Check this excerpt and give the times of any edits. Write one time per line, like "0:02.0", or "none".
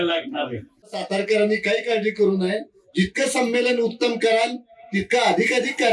0:01.0